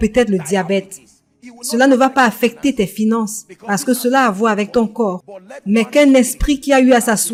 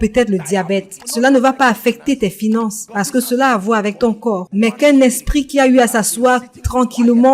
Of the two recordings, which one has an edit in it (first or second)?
second